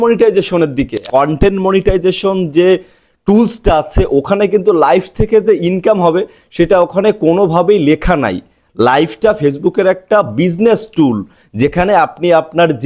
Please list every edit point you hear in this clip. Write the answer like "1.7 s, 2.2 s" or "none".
1.0 s